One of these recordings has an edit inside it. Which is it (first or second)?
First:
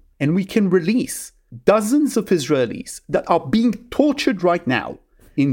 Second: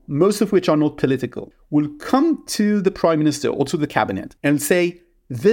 second